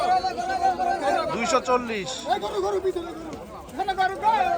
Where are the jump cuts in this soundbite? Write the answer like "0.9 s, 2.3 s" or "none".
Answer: none

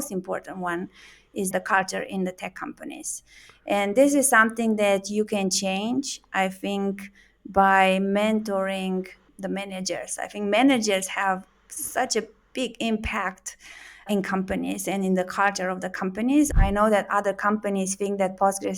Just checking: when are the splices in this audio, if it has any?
1.5 s, 9.2 s, 14.1 s, 16.5 s

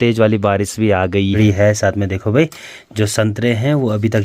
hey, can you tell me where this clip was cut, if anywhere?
1.4 s

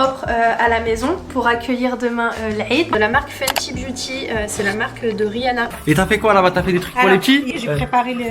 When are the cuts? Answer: 2.9 s, 5.8 s, 7.5 s

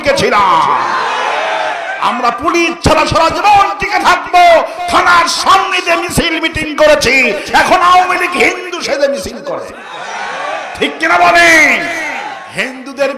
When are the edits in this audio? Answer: none

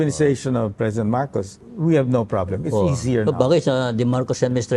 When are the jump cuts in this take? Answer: 1.6 s

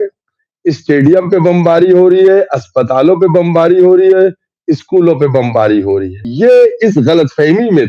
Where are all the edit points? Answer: 6.2 s

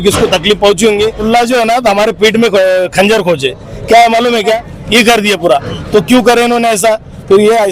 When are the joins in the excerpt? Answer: 1.2 s, 4.7 s

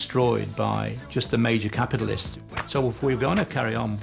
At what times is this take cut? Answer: 2.2 s

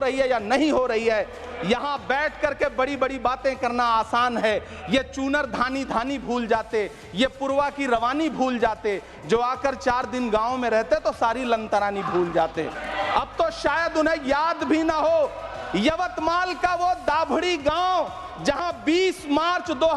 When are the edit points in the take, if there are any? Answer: 12.8 s

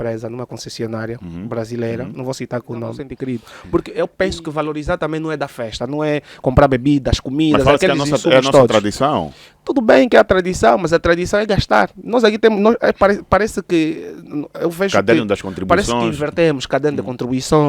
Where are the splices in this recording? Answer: 3.1 s

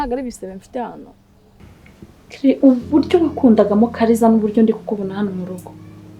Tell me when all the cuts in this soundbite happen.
1.7 s

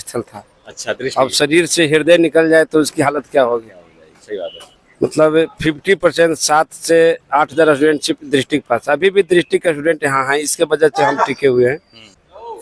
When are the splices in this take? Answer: none

